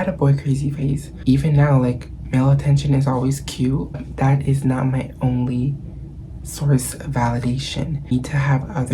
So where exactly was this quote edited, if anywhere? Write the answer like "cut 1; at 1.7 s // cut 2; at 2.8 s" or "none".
cut 1; at 1.1 s // cut 2; at 4.0 s // cut 3; at 8.1 s